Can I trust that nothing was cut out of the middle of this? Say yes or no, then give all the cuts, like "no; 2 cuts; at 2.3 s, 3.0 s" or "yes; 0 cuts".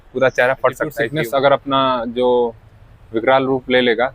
no; 1 cut; at 1.0 s